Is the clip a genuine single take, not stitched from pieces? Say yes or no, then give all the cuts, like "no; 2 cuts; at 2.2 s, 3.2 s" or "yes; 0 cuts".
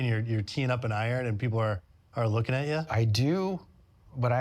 no; 1 cut; at 2.9 s